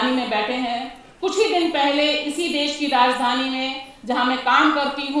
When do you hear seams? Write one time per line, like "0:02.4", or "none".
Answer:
none